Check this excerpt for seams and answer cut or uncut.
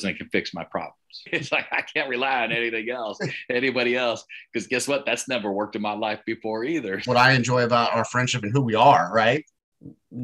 cut